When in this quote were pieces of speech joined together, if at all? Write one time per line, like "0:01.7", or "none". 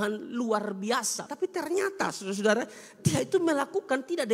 0:01.2